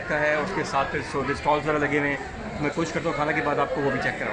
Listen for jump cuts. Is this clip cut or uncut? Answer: uncut